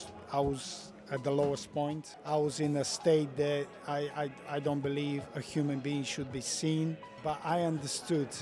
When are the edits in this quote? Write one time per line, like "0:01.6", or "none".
0:02.1
0:07.2